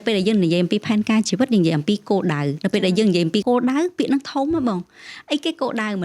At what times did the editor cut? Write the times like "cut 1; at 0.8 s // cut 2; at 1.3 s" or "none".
cut 1; at 3.4 s